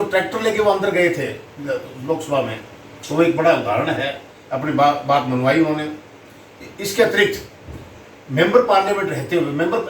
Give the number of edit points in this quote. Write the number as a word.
zero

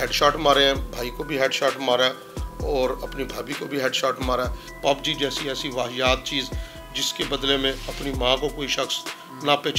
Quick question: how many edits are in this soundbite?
one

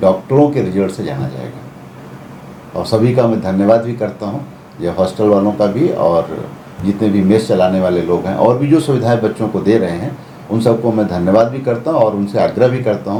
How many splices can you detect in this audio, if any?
zero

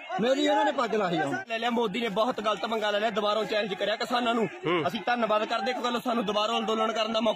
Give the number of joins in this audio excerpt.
one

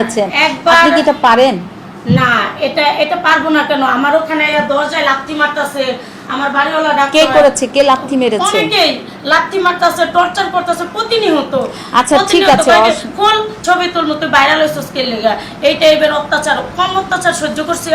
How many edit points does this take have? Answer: zero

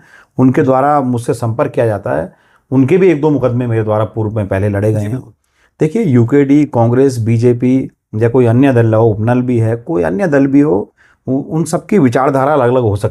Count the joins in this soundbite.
zero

